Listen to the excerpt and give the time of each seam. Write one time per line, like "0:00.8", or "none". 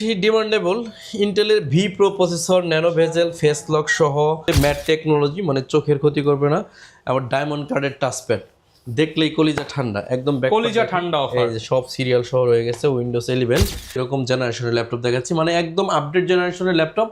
0:04.5
0:13.9